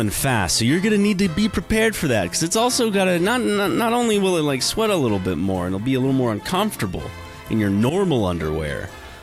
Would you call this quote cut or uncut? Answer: uncut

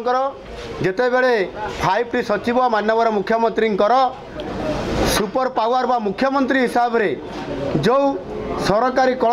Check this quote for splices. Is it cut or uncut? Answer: uncut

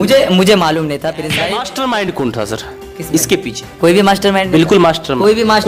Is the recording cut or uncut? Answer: cut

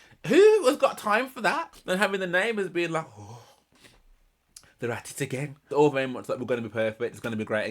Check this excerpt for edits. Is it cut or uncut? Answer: cut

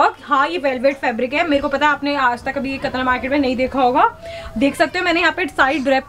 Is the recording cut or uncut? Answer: uncut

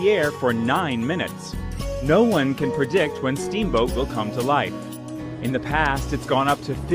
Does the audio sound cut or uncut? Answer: cut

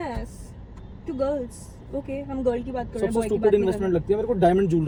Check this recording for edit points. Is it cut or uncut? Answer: uncut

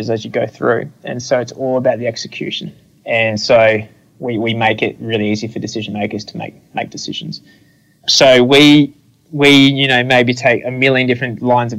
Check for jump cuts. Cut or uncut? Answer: cut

